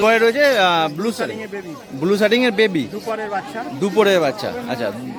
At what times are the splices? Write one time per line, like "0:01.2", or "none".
none